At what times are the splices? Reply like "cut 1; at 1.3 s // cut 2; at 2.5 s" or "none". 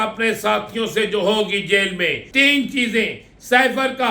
cut 1; at 2.2 s